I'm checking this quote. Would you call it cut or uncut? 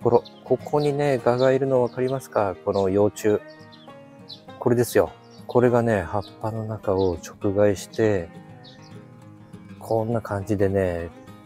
uncut